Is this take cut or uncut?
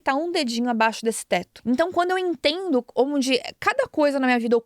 cut